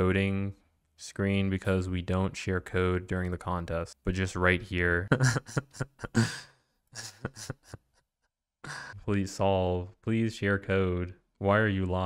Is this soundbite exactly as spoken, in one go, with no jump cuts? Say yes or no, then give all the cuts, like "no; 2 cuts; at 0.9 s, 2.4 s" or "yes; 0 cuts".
no; 3 cuts; at 3.9 s, 5.0 s, 9.0 s